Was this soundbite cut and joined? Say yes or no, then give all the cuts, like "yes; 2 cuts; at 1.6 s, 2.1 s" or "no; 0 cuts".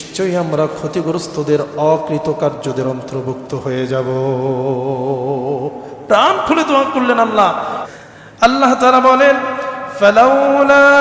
yes; 1 cut; at 7.8 s